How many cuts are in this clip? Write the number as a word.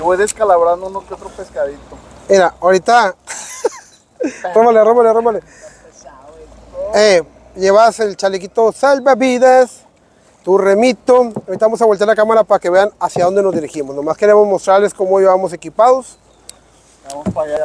zero